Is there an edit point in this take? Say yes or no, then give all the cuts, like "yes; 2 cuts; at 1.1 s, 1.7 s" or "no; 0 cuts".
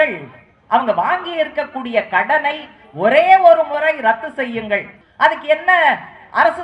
yes; 1 cut; at 5.0 s